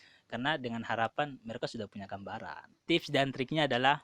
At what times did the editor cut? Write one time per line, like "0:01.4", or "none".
0:02.8